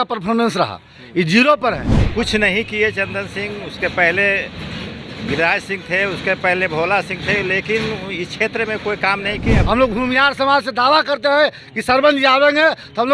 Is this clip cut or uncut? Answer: cut